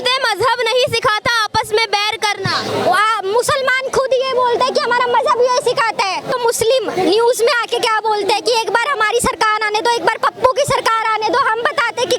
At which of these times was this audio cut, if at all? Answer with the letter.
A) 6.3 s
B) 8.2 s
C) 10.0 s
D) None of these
A